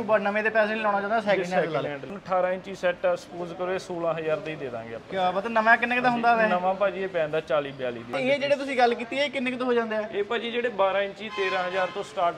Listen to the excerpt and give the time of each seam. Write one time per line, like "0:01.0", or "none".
0:02.1
0:08.0